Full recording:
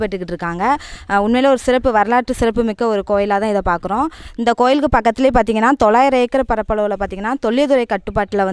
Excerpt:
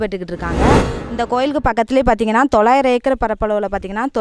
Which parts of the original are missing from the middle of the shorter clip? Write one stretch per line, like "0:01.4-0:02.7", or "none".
0:00.9-0:04.2

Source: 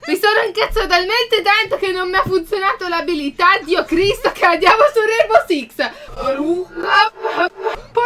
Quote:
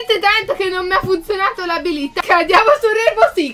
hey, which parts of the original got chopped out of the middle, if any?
0:03.4-0:04.3

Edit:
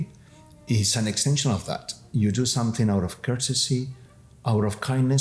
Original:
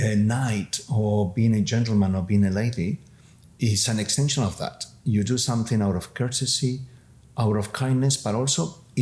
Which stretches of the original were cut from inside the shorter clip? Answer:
none

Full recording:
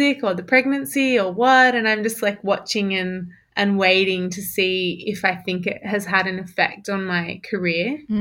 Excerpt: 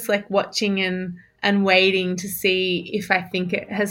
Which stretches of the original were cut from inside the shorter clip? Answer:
none

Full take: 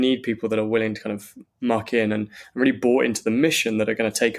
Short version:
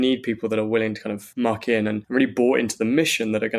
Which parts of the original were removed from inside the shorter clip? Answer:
0:01.2-0:01.4
0:02.3-0:02.5

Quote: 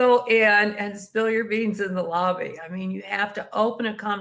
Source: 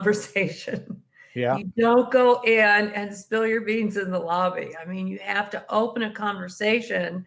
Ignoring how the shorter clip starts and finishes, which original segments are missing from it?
none

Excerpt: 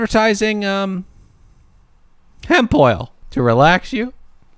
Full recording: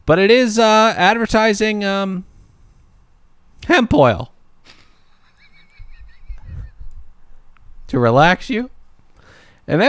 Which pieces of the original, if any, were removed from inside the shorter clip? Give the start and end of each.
0:04.3-0:07.7

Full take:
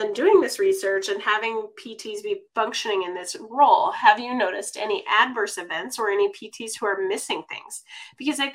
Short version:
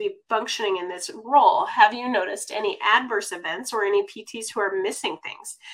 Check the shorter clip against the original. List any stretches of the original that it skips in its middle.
none

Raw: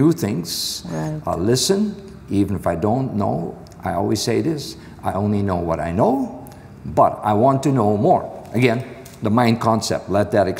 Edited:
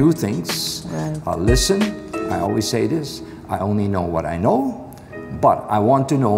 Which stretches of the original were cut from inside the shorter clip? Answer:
0:02.1-0:03.6

